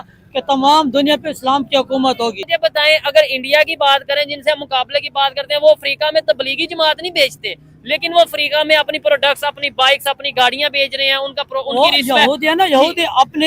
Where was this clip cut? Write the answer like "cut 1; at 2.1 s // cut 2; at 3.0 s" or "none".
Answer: cut 1; at 2.4 s